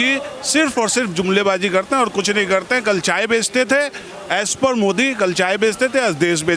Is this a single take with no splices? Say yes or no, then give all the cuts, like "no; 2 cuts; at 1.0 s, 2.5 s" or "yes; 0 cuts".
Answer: yes; 0 cuts